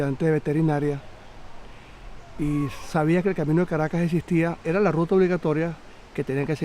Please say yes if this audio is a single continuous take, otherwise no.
no